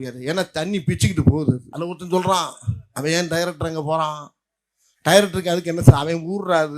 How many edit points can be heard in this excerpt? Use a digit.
1